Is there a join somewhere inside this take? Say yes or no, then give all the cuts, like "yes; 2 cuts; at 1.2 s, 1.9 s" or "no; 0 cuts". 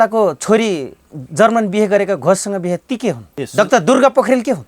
yes; 1 cut; at 3.3 s